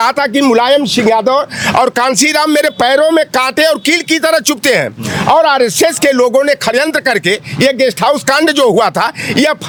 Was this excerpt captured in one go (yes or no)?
yes